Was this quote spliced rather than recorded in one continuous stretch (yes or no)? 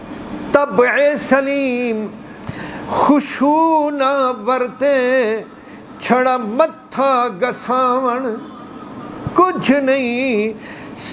no